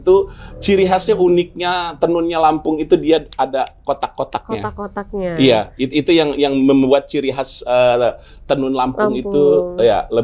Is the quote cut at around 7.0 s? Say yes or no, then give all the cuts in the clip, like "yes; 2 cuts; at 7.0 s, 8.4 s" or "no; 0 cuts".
no; 0 cuts